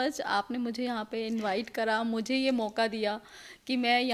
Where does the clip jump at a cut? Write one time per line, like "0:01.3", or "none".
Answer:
none